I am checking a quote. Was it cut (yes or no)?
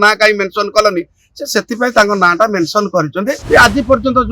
yes